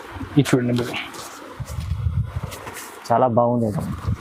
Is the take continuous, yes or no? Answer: yes